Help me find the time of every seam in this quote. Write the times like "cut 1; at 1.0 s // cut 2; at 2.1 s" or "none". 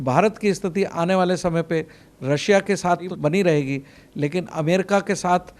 cut 1; at 3.1 s